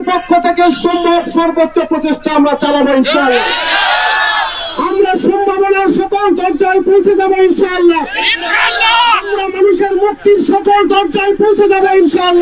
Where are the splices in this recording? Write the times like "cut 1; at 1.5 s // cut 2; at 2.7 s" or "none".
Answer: none